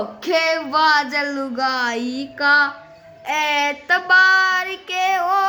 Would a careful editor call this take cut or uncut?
uncut